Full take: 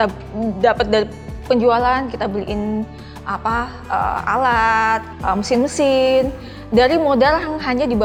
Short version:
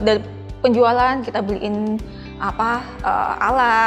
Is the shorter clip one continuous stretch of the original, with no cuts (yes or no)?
yes